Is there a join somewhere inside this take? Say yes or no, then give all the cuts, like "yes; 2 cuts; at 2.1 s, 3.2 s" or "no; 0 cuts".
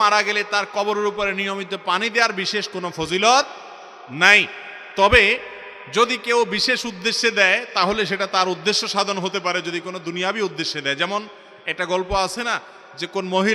no; 0 cuts